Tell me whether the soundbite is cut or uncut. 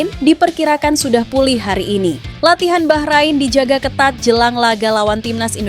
cut